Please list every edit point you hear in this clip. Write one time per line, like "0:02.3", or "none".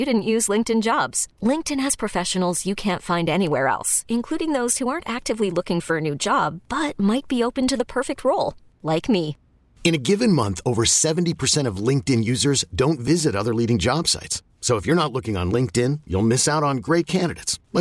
none

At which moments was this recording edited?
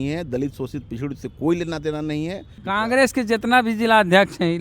0:02.5

